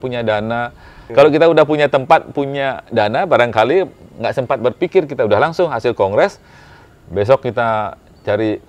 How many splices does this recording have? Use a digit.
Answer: 1